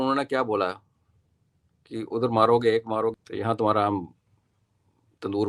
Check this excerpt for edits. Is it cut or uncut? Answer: cut